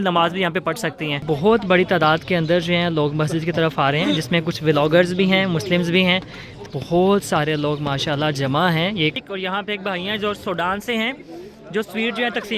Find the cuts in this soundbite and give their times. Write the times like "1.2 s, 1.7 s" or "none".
1.2 s, 6.6 s, 9.2 s